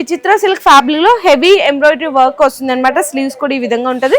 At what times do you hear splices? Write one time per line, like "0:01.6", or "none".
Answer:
none